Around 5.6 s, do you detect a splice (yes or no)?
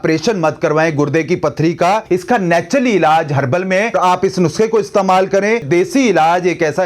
yes